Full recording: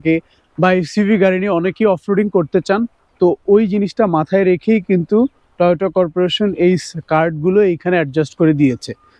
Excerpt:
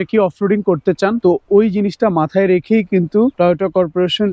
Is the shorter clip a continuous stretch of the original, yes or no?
no